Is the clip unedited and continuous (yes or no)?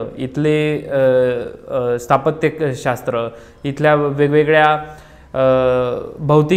yes